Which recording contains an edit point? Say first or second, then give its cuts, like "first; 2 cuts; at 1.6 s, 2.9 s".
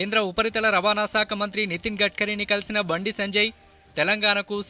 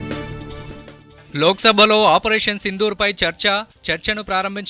second; 1 cut; at 1.2 s